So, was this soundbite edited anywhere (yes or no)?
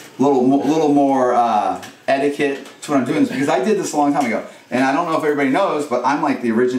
no